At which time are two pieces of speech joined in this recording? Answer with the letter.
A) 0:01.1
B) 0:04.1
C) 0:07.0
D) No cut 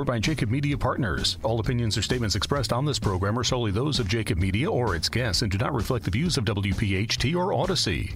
A